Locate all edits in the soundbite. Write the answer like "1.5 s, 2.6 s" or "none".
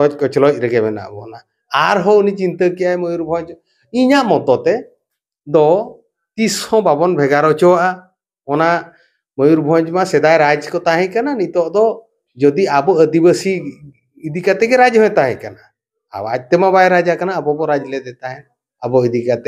none